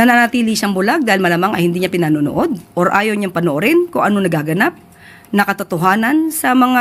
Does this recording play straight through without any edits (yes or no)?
yes